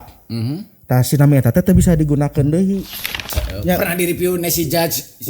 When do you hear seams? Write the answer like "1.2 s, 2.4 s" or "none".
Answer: 3.3 s

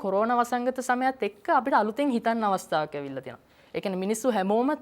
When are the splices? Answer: none

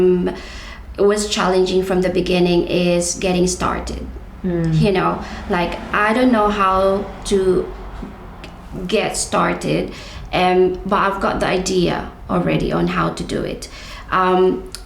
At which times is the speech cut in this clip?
none

